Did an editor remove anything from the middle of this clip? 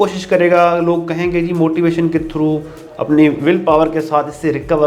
no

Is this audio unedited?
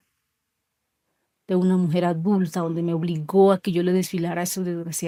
yes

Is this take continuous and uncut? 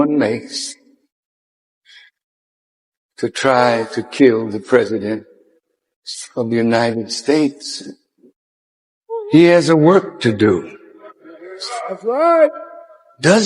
yes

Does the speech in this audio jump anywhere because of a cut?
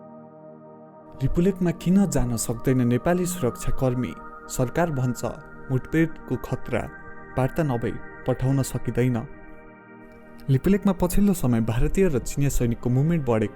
yes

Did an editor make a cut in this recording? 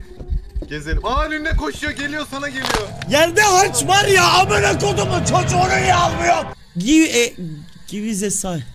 yes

